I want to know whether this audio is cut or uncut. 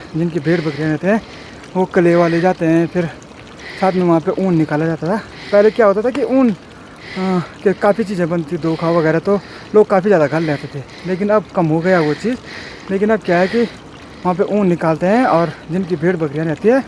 uncut